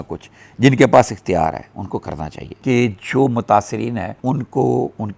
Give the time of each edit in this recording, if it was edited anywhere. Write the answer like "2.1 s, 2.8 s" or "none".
2.5 s